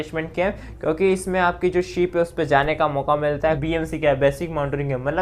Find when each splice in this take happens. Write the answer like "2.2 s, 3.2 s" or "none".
3.6 s